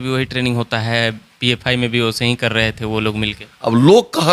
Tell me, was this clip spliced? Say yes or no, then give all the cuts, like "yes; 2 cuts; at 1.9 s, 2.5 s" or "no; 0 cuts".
no; 0 cuts